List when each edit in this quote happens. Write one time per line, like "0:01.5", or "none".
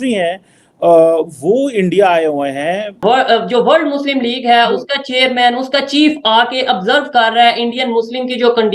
0:03.0